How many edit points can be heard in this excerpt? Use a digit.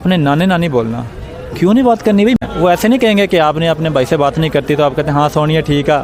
1